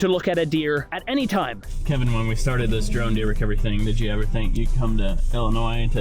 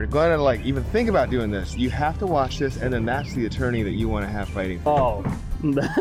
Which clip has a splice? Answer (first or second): first